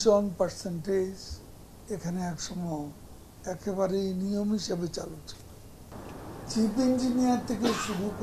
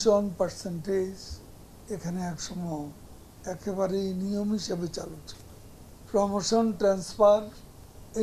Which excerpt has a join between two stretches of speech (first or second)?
first